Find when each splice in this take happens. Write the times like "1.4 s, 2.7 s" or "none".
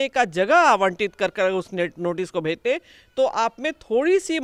none